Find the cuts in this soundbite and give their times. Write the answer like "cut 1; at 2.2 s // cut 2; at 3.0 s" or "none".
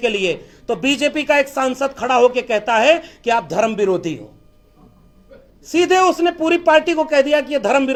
none